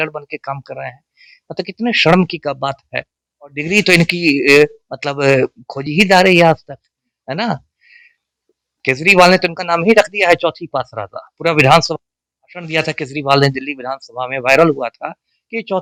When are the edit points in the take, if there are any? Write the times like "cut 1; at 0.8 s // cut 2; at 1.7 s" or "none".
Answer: none